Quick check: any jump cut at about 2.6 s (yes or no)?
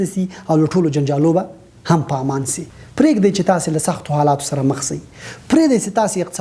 yes